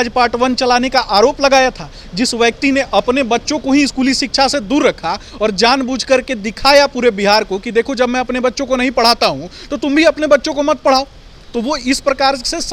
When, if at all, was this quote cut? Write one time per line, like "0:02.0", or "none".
none